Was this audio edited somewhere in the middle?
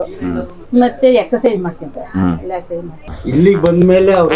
yes; 1 cut; at 3.0 s

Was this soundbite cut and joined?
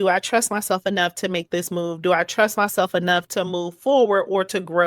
no; 0 cuts

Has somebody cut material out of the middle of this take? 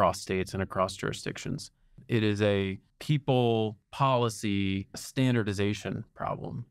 yes; 4 cuts; at 2.0 s, 2.9 s, 3.8 s, 5.1 s

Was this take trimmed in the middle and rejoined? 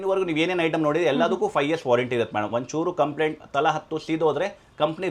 no; 0 cuts

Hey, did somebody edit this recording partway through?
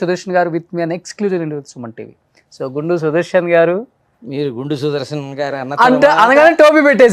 no; 0 cuts

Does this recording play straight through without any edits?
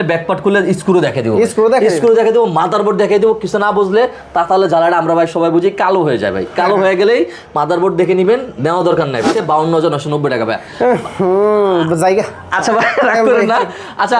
no; 1 cut; at 9.3 s

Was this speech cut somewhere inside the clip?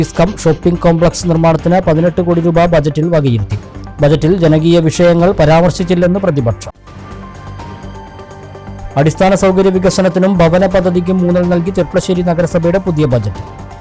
no; 0 cuts

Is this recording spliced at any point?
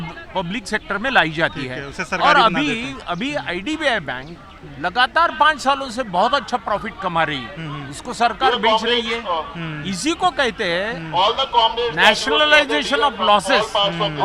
no; 0 cuts

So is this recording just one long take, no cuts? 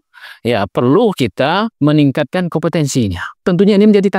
no; 2 cuts; at 1.7 s, 3.3 s

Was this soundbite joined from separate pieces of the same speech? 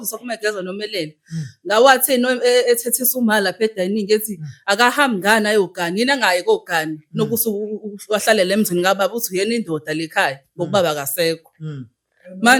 no; 0 cuts

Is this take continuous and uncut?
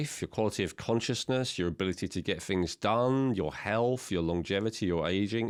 yes; 0 cuts

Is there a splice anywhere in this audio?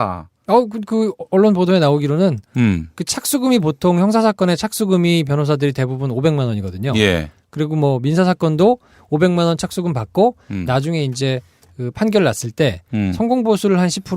yes; 1 cut; at 2.5 s

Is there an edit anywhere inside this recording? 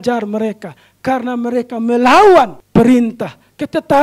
yes; 1 cut; at 2.6 s

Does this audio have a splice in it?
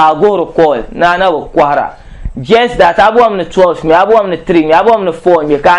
no; 0 cuts

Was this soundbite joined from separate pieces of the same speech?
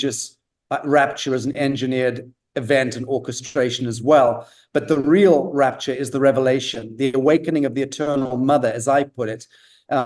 yes; 1 cut; at 7.1 s

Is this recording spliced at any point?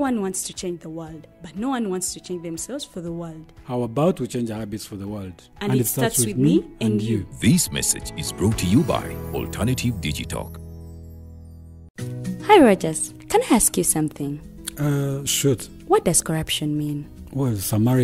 yes; 1 cut; at 11.9 s

